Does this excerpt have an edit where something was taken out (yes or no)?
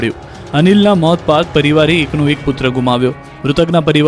no